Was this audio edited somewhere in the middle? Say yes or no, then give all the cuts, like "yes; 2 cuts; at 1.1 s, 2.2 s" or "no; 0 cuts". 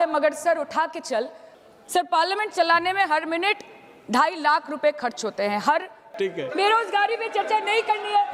yes; 2 cuts; at 1.4 s, 6.1 s